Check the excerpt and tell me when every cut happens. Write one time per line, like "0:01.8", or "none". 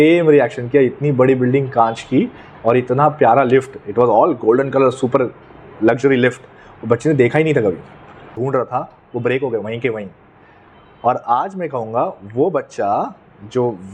0:08.3

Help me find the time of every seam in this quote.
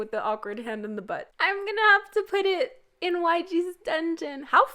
0:01.3

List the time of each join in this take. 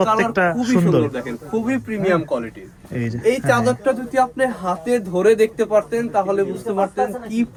none

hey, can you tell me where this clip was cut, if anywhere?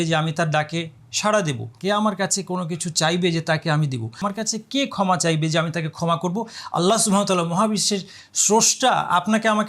0:01.7
0:04.2

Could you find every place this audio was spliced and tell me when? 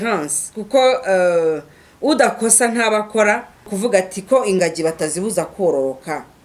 0:03.7

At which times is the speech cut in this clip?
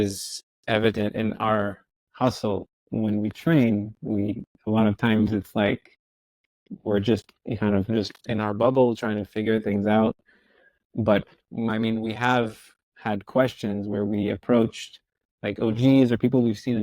0:02.8

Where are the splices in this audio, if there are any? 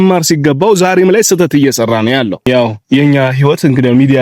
0:02.5

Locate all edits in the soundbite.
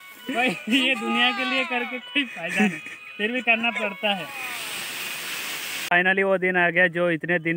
0:05.8

